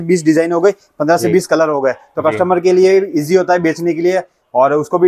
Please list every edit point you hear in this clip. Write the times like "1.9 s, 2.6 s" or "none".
none